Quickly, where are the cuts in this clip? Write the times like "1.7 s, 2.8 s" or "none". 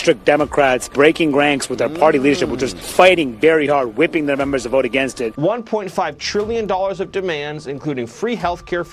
5.3 s